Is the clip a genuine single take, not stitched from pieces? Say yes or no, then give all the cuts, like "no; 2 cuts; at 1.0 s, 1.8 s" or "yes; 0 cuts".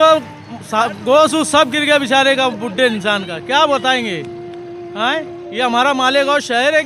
yes; 0 cuts